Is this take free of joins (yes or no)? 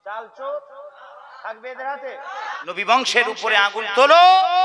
no